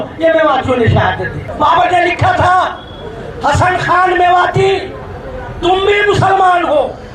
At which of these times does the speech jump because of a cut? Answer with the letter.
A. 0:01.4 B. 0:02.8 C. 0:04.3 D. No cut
A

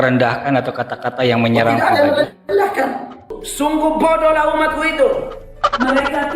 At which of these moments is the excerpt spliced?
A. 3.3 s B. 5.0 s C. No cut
A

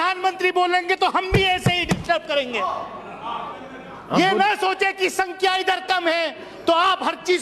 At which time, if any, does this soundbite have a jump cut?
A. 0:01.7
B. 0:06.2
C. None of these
C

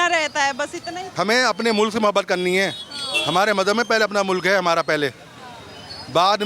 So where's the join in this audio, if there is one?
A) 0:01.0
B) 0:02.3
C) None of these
A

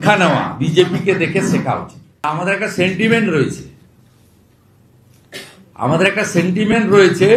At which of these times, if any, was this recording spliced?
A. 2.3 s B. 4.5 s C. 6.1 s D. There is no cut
A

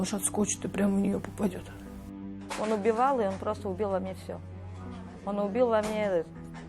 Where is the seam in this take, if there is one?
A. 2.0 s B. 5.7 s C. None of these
A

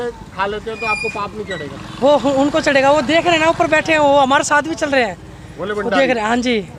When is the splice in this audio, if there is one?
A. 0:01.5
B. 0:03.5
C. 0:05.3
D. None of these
D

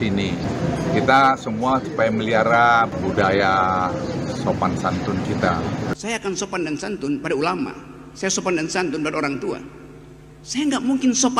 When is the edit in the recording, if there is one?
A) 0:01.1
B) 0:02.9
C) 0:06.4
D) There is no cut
B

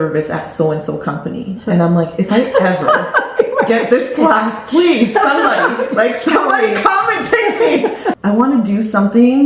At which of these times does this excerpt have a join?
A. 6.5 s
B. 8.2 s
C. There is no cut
B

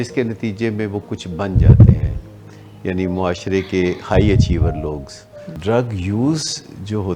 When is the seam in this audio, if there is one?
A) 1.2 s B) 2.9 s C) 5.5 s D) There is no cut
C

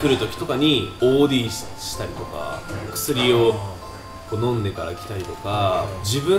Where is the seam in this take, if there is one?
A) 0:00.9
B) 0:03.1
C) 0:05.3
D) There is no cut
A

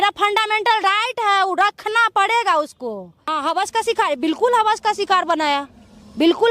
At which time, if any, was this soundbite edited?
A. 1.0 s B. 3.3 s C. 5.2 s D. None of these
B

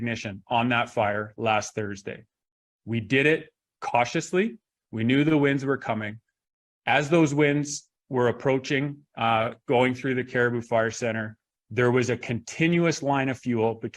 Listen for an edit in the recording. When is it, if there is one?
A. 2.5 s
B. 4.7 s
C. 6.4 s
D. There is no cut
B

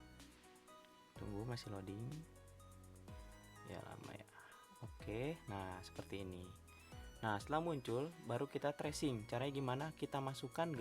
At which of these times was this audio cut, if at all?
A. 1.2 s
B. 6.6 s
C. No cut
A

